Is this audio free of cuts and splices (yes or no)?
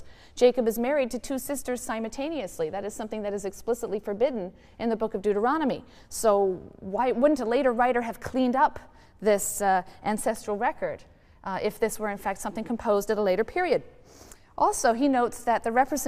no